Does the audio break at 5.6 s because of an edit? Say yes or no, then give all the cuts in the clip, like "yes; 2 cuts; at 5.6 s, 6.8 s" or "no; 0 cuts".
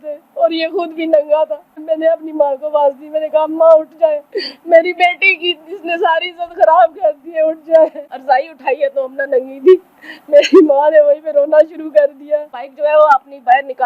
no; 3 cuts; at 1.7 s, 8.2 s, 12.8 s